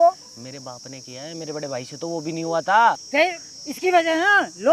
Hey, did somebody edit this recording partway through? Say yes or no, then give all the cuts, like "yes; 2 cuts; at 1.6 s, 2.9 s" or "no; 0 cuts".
yes; 1 cut; at 3.0 s